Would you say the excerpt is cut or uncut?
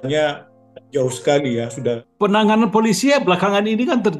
cut